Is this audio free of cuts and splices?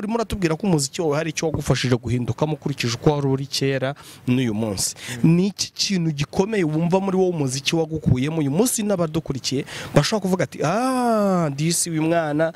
yes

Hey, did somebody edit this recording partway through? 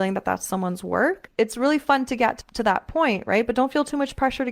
yes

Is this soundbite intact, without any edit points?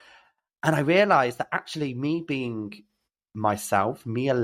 yes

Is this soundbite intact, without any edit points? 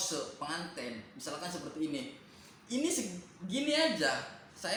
yes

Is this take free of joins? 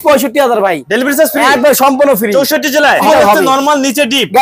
no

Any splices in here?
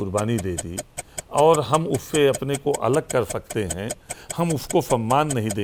no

